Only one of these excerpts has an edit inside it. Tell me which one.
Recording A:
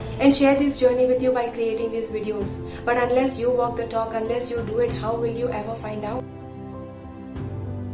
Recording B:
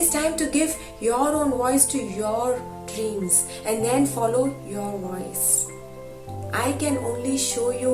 A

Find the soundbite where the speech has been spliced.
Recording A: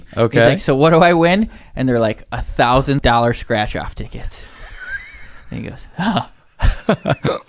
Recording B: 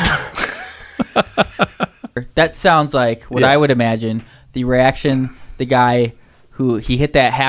B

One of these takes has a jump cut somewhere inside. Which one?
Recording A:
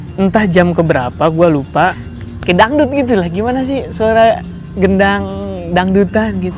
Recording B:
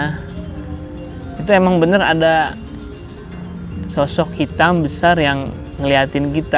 A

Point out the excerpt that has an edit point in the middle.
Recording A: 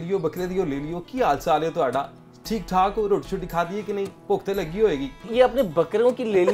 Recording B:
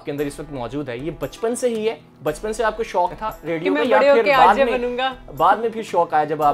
A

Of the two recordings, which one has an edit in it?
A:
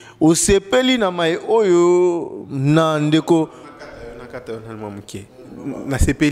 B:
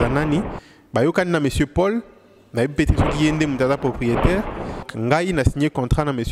B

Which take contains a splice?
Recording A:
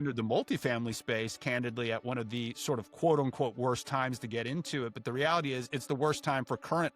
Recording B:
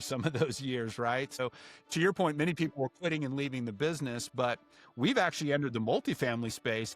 B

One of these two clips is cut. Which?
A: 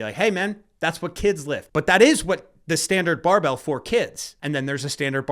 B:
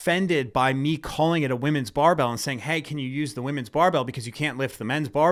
A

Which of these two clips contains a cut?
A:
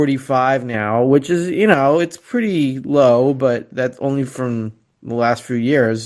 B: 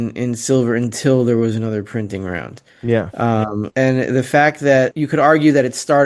B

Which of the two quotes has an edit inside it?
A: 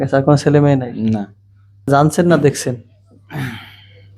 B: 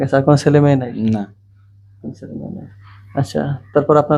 A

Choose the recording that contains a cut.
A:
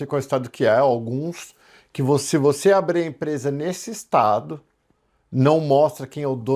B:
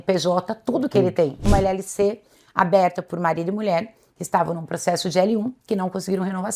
B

